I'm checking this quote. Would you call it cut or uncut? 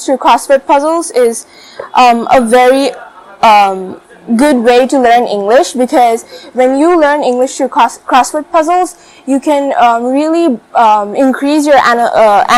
uncut